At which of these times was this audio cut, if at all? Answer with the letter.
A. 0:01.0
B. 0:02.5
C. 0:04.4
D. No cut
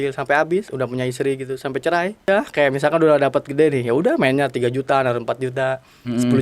B